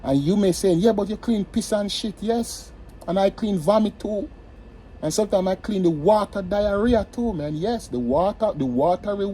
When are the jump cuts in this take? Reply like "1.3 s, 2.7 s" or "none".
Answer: none